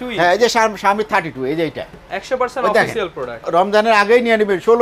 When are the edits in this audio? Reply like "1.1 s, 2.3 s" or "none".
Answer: 3.4 s